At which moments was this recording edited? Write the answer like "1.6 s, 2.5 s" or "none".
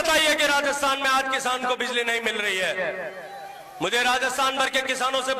none